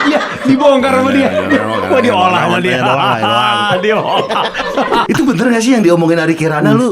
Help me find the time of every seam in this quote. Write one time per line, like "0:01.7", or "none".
0:05.1